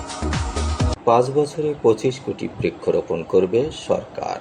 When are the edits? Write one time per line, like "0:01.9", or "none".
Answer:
0:01.0